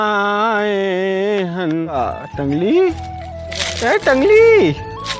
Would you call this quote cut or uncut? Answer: cut